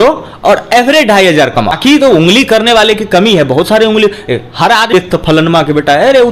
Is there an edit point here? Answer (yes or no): yes